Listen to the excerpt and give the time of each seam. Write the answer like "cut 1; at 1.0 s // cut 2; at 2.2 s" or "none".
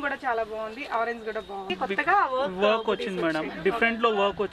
cut 1; at 1.7 s